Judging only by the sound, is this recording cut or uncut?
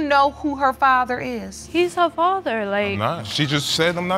cut